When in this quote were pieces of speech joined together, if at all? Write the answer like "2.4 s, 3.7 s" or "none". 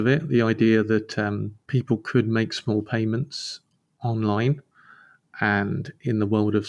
1.5 s